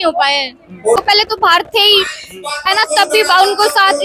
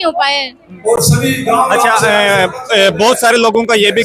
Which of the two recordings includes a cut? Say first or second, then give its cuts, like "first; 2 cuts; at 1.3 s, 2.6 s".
first; 1 cut; at 1.0 s